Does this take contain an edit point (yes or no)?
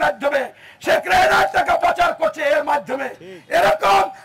no